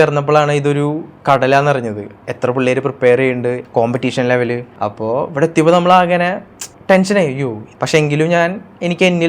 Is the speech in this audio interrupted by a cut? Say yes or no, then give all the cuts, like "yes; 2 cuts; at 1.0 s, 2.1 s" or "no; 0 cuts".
yes; 2 cuts; at 3.6 s, 7.7 s